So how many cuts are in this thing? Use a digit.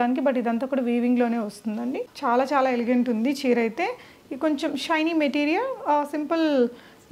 1